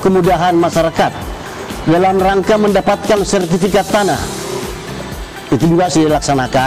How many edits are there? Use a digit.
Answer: 0